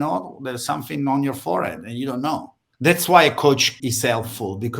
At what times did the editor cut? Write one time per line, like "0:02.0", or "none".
0:02.6
0:03.8